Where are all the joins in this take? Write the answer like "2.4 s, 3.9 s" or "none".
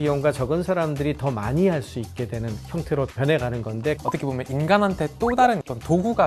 4.0 s